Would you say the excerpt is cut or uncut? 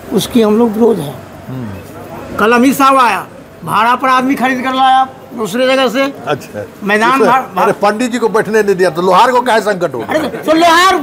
uncut